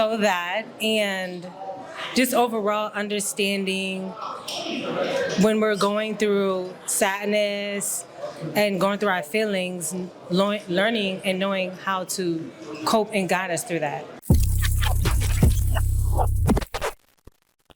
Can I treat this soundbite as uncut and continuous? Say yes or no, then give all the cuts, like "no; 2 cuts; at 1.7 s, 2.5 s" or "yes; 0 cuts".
no; 1 cut; at 14.1 s